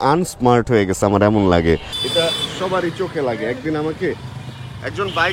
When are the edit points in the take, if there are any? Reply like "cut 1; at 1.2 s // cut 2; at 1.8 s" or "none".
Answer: cut 1; at 1.9 s